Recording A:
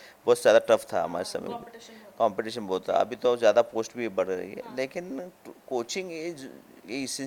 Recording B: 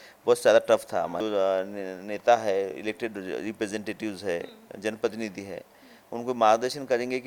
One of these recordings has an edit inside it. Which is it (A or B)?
B